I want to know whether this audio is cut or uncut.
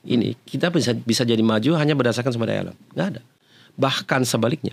uncut